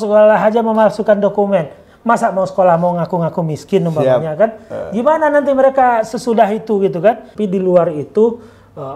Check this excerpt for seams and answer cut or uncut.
cut